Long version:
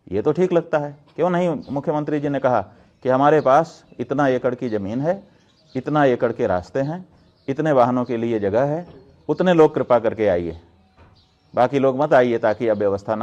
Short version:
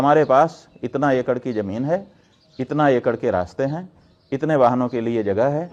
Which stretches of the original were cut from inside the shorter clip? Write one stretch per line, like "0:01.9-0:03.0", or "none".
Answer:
none